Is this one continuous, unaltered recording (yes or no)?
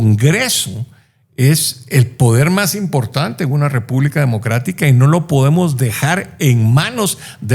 yes